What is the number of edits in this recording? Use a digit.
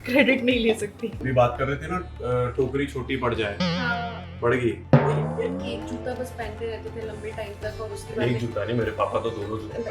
2